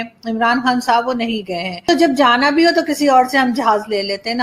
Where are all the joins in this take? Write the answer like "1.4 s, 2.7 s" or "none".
1.8 s

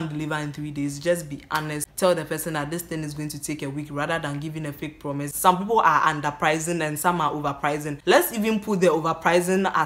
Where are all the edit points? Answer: 1.9 s, 5.3 s, 7.9 s

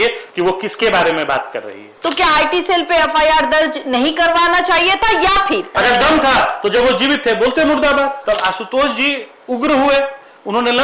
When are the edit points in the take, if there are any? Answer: 1.9 s, 5.7 s, 8.2 s

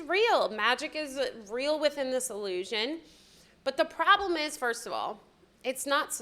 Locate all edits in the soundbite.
none

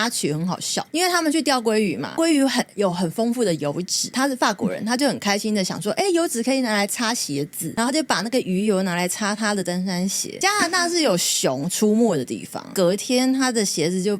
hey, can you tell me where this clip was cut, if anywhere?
10.3 s, 12.6 s

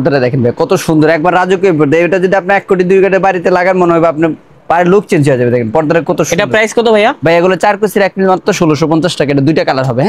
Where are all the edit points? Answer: none

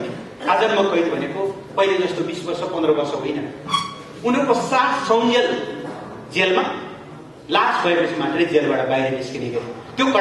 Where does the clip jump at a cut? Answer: none

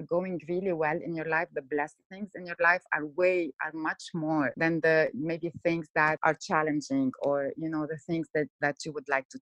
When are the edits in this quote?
4.5 s, 6.2 s

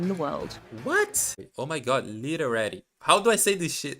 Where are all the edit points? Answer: 1.4 s

